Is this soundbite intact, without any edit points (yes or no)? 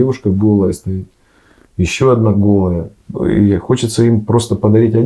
yes